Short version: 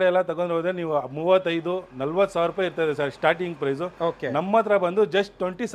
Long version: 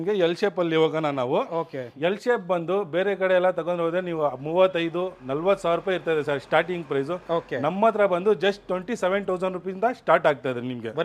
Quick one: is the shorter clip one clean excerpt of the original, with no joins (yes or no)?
yes